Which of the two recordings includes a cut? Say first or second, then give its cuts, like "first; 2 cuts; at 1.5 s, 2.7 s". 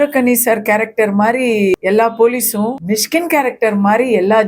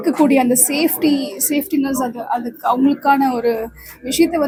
first; 2 cuts; at 1.7 s, 2.8 s